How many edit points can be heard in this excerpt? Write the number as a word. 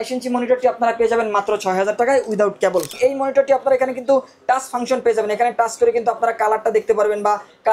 one